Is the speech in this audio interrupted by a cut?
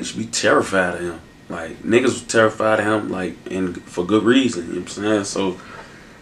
yes; 1 cut; at 1.7 s

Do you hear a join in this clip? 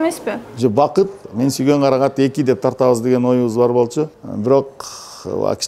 yes; 2 cuts; at 1.2 s, 4.2 s

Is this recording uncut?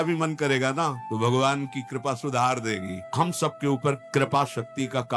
no; 3 cuts; at 1.0 s, 3.0 s, 4.0 s

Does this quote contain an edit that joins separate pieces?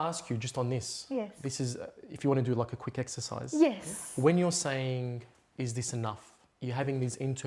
no; 0 cuts

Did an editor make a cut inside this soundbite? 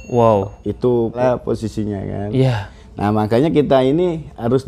yes; 1 cut; at 1.2 s

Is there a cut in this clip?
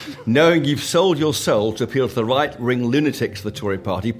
no; 0 cuts

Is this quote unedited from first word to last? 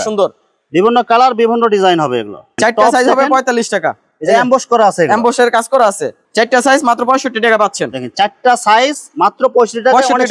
no; 2 cuts; at 2.4 s, 6.2 s

